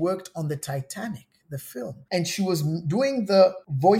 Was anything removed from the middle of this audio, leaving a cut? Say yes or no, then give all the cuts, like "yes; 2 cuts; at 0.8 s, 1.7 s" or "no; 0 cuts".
no; 0 cuts